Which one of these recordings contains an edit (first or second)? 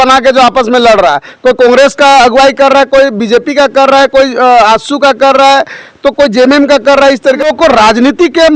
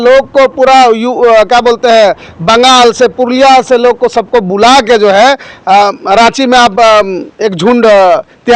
first